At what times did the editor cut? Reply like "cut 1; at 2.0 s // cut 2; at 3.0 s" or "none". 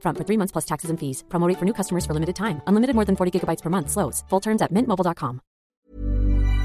cut 1; at 5.7 s